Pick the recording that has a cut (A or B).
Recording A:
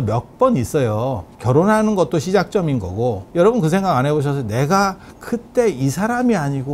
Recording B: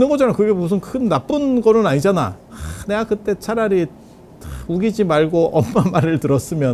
A